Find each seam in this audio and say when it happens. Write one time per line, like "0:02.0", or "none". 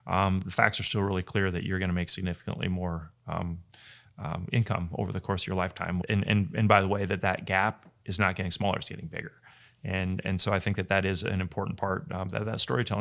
0:06.0